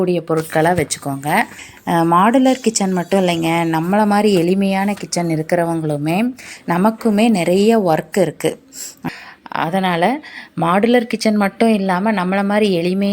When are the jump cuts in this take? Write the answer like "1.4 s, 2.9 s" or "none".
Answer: 1.6 s, 8.9 s